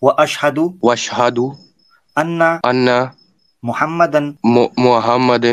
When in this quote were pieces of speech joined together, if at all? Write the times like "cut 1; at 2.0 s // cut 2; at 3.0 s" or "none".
cut 1; at 0.8 s // cut 2; at 2.6 s // cut 3; at 4.3 s